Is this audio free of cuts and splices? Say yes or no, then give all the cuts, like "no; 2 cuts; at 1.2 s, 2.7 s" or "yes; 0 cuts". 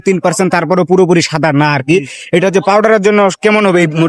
yes; 0 cuts